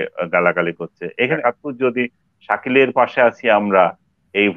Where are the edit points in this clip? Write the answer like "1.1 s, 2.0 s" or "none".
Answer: 1.4 s

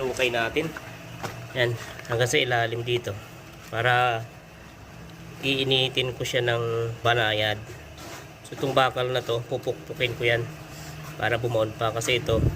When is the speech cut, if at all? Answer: 7.0 s

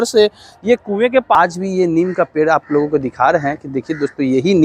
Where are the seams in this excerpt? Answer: 1.4 s

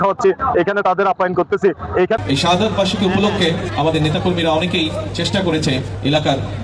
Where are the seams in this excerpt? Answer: 2.2 s

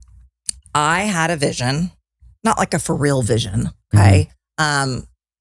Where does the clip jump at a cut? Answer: none

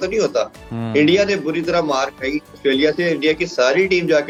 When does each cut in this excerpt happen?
none

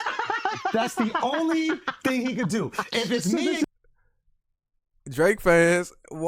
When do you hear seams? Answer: none

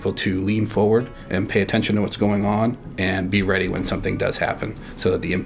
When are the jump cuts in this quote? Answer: none

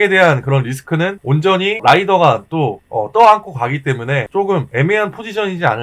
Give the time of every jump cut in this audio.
1.2 s, 2.8 s, 4.5 s

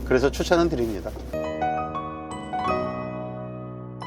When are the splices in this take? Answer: 1.2 s

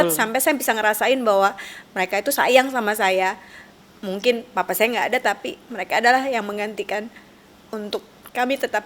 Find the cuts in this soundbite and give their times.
none

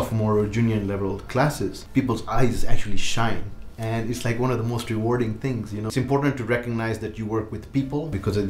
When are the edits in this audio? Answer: 1.8 s, 5.9 s

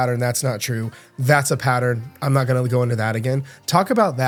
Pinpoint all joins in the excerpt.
none

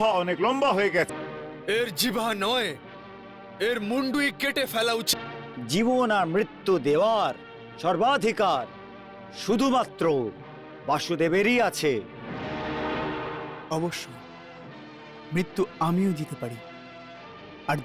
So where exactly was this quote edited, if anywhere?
1.1 s, 5.1 s

